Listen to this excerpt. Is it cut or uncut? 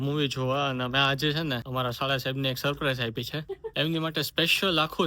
cut